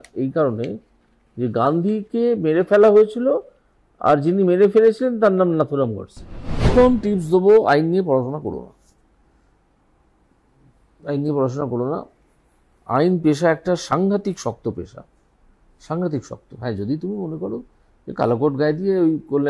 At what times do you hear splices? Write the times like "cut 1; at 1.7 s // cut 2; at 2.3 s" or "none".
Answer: cut 1; at 6.7 s